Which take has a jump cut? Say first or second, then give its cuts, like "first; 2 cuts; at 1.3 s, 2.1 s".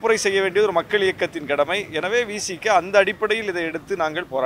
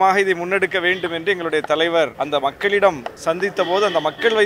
second; 2 cuts; at 2.2 s, 3.1 s